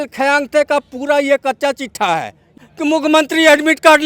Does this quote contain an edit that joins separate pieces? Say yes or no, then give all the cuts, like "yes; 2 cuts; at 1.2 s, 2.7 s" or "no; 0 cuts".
yes; 1 cut; at 2.6 s